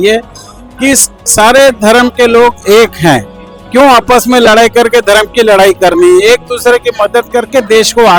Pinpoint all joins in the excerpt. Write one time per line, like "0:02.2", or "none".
none